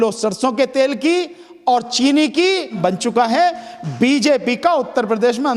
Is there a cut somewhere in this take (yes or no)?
yes